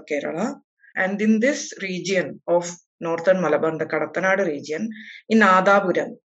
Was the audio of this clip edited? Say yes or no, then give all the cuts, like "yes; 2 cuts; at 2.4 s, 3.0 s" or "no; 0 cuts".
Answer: yes; 1 cut; at 0.9 s